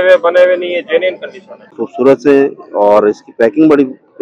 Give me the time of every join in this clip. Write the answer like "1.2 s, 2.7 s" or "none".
1.8 s